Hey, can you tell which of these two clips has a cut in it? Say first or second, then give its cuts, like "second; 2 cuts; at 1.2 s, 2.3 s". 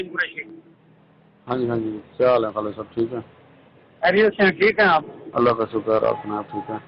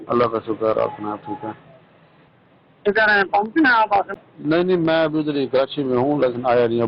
second; 1 cut; at 4.1 s